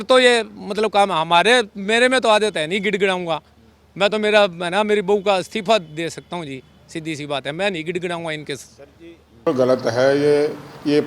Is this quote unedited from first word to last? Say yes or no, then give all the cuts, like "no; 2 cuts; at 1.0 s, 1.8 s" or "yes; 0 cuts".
no; 1 cut; at 9.5 s